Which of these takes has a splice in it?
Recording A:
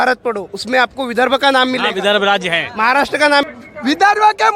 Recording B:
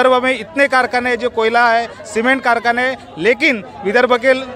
A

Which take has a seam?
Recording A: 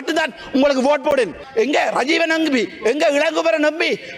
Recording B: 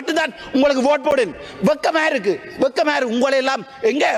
A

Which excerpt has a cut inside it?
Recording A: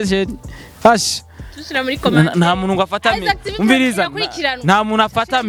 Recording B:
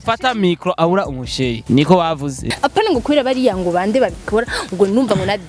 B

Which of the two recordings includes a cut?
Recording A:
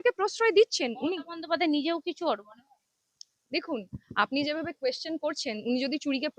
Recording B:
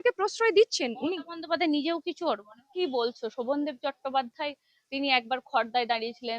B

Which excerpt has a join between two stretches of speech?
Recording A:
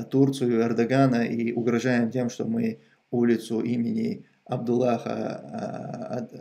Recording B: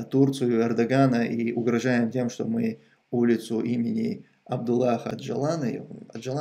B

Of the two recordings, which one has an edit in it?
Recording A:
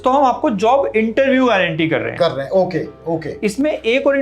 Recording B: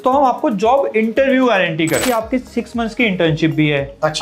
B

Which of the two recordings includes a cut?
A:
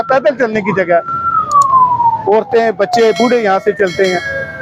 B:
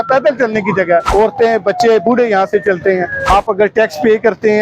B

